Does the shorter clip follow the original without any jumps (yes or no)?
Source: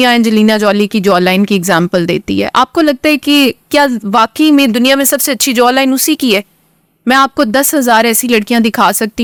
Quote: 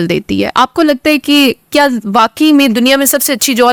yes